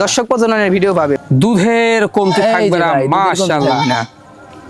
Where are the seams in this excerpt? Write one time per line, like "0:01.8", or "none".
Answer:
0:01.2